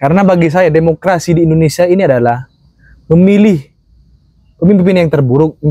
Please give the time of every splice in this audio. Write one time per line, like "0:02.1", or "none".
none